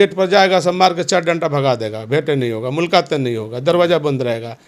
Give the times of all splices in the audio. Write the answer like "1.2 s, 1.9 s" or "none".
none